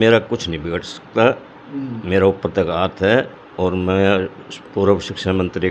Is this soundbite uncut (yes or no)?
yes